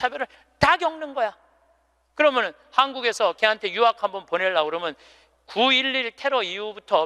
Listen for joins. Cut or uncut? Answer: uncut